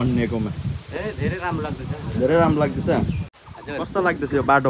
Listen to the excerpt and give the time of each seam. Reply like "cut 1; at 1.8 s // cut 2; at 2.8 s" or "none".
cut 1; at 3.3 s